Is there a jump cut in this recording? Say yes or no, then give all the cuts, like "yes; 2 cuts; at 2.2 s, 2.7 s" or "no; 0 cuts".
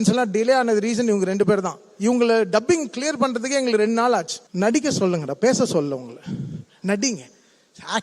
yes; 1 cut; at 4.4 s